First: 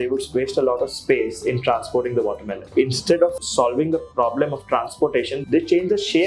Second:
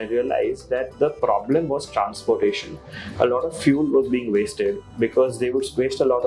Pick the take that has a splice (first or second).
first